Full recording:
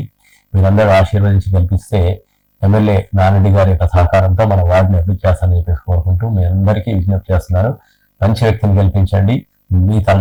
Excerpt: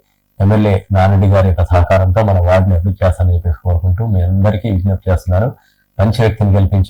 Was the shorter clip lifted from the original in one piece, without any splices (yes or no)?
yes